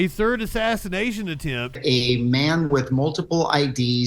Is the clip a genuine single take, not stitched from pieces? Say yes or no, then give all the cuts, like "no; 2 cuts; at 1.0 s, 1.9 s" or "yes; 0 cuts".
no; 1 cut; at 1.8 s